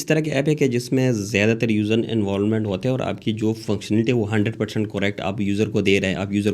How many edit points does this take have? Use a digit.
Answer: 0